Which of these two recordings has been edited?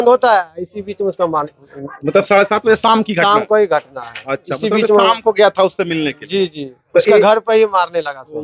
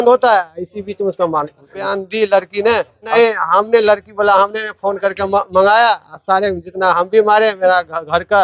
second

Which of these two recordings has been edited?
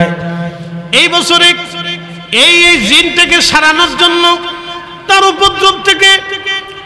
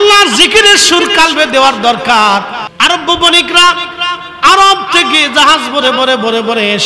second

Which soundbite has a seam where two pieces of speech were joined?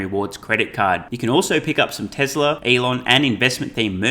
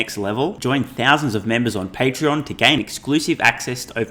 first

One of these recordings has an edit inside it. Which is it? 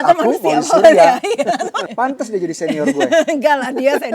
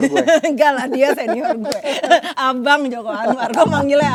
first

